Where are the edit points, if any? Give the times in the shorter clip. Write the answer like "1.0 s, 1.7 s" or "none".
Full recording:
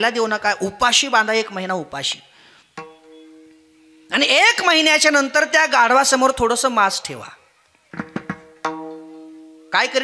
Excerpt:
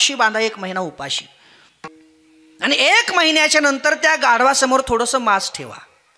1.9 s